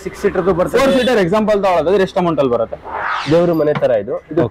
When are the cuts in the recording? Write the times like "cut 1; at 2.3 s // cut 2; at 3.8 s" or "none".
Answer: cut 1; at 3.1 s

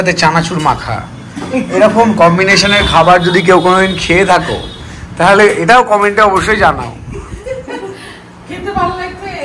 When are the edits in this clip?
none

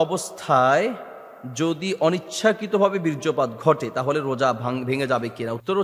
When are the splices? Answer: none

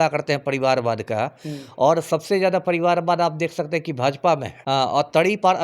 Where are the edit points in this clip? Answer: cut 1; at 4.5 s

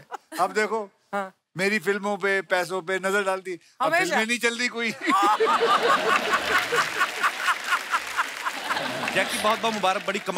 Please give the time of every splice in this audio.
cut 1; at 8.8 s

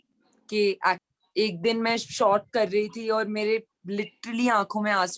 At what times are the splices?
cut 1; at 1.1 s

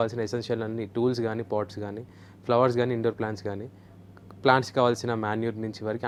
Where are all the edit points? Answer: none

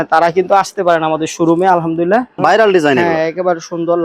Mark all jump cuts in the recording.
cut 1; at 2.4 s

